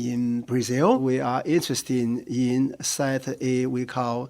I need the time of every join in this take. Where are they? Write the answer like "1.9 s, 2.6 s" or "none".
1.0 s